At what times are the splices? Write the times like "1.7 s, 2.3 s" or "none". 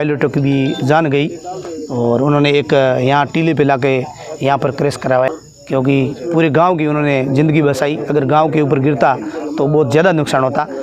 5.3 s